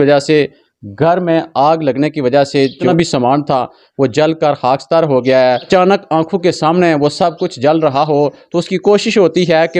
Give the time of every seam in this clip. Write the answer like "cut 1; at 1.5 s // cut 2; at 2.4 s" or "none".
cut 1; at 2.8 s // cut 2; at 5.7 s

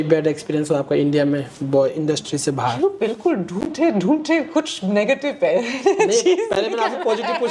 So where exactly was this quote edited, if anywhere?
none

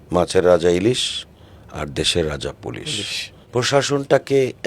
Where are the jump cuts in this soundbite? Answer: cut 1; at 3.4 s

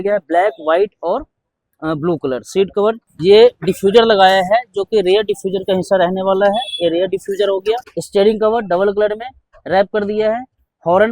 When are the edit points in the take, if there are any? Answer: cut 1; at 3.1 s // cut 2; at 7.9 s

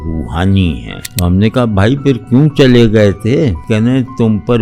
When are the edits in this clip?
cut 1; at 1.0 s // cut 2; at 3.6 s

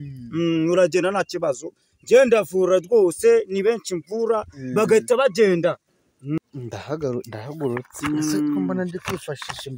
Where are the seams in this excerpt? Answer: cut 1; at 6.4 s

